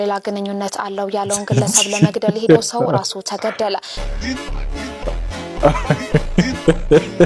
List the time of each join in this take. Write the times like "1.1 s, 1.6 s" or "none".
none